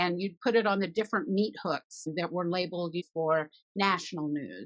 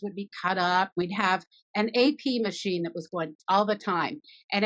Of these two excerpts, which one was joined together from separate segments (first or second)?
second